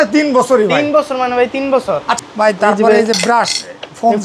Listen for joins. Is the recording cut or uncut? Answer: cut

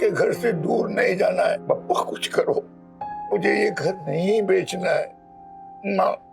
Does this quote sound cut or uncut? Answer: cut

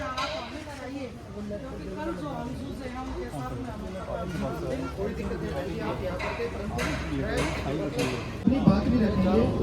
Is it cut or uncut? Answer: uncut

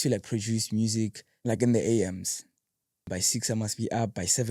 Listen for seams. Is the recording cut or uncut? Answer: cut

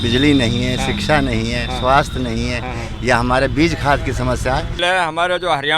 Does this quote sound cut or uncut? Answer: cut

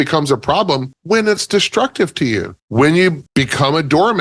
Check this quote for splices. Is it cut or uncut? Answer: cut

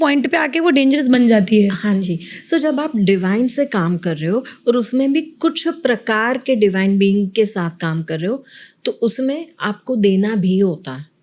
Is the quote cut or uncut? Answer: uncut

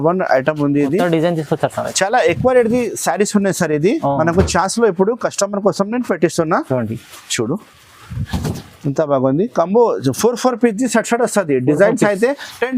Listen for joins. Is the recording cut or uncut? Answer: uncut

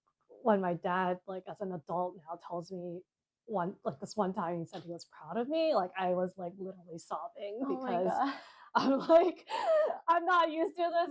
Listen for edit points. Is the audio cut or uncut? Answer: uncut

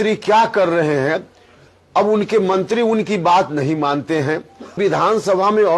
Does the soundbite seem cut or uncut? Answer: cut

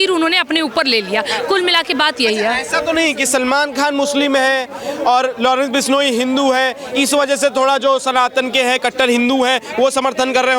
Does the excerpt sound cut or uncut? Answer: uncut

